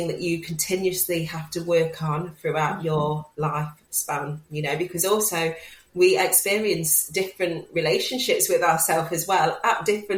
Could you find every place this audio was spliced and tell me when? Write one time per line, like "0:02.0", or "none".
none